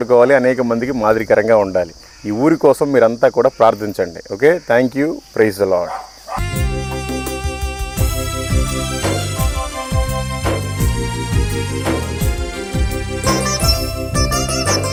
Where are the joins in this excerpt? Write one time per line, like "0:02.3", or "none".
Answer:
none